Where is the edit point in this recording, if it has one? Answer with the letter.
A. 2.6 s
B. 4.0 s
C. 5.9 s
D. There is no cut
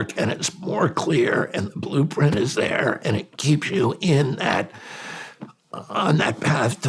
D